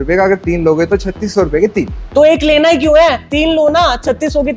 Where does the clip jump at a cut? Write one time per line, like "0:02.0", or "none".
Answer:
none